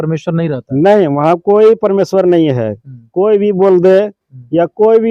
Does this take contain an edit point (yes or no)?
no